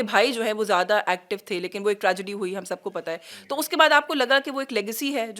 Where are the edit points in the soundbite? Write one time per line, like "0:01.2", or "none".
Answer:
none